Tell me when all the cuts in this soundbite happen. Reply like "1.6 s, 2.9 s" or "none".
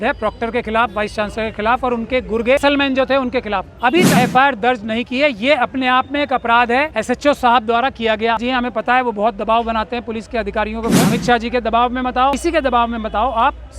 2.6 s, 4.1 s, 7.0 s, 8.4 s, 11.1 s, 12.4 s